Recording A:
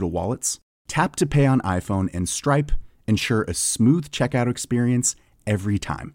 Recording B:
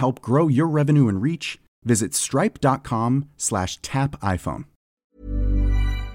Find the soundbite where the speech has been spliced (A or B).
B